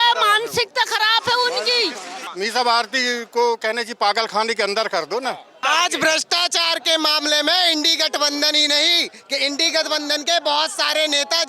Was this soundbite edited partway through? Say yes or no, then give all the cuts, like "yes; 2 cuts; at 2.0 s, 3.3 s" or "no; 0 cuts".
yes; 2 cuts; at 2.3 s, 5.6 s